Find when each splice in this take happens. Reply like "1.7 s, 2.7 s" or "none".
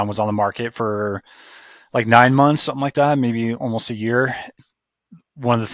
4.6 s